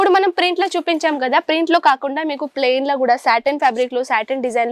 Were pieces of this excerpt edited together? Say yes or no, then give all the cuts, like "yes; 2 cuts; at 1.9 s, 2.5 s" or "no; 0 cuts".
no; 0 cuts